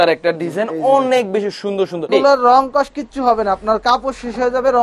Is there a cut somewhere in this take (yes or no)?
yes